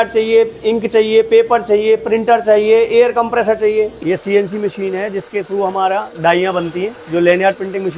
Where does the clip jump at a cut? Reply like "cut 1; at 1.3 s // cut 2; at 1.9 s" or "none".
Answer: cut 1; at 3.9 s